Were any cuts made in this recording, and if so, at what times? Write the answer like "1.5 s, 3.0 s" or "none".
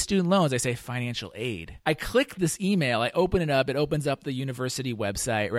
1.7 s